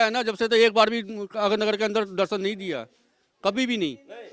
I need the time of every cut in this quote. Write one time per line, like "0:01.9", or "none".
none